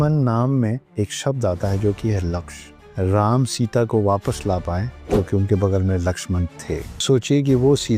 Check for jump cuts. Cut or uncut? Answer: cut